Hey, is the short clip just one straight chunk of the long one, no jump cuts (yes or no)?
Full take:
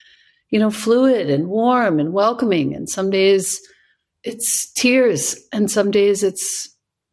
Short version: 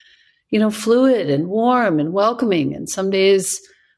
yes